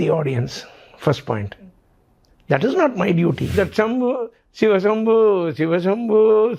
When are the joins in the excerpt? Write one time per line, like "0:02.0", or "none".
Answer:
0:03.5